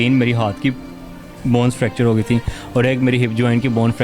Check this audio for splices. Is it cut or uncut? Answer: uncut